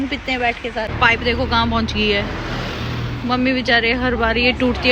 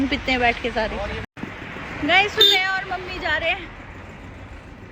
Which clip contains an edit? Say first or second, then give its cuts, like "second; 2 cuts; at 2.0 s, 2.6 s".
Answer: first; 1 cut; at 0.9 s